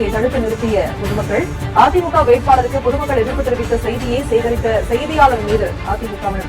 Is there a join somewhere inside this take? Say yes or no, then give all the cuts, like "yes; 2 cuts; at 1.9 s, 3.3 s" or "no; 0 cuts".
no; 0 cuts